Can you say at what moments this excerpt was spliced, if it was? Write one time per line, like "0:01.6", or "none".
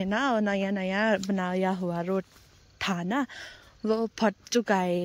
none